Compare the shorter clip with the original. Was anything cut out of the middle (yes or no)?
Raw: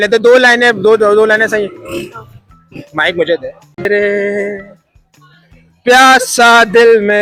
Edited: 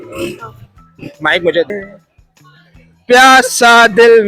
yes